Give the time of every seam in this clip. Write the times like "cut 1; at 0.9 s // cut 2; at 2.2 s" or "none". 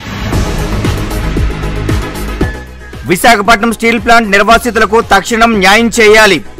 cut 1; at 1.2 s // cut 2; at 2.3 s